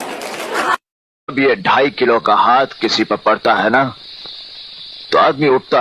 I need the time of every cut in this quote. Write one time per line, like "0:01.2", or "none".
0:01.2